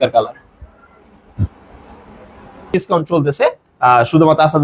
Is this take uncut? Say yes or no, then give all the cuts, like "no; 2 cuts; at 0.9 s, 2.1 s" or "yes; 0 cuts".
no; 1 cut; at 2.7 s